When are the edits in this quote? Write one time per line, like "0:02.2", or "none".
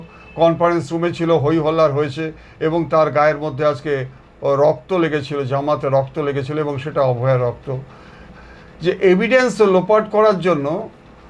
0:08.3